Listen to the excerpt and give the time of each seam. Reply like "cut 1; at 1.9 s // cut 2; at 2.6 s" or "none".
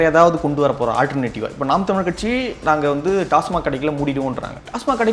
none

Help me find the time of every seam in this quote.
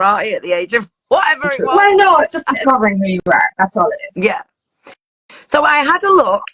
cut 1; at 2.4 s

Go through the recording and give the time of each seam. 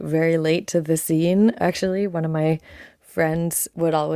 cut 1; at 1.6 s

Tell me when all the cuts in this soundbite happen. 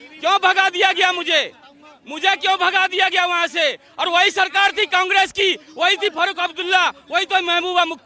none

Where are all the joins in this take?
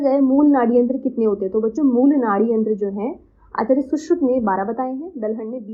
none

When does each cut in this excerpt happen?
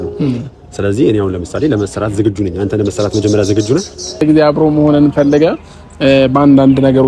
cut 1; at 4.2 s

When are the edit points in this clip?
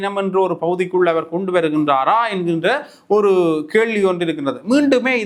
none

